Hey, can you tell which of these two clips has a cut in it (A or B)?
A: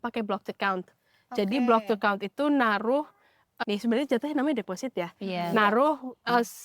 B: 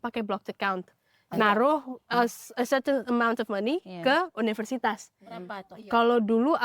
B